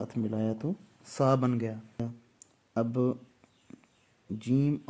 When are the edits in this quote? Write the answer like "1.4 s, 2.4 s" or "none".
2.0 s